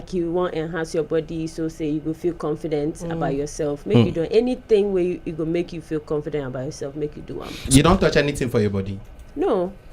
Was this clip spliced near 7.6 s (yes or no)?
yes